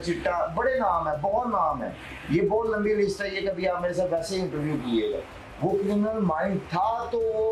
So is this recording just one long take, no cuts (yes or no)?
no